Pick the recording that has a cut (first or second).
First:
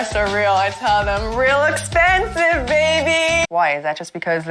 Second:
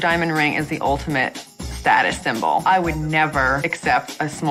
first